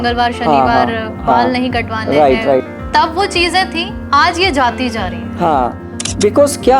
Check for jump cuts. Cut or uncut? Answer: cut